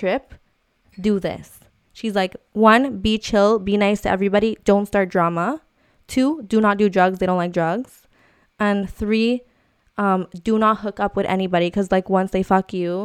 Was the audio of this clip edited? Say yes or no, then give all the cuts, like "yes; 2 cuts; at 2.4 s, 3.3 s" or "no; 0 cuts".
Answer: no; 0 cuts